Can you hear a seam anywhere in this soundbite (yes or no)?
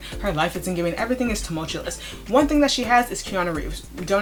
no